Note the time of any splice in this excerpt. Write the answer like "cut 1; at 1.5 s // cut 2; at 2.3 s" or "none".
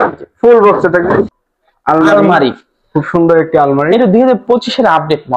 cut 1; at 1.3 s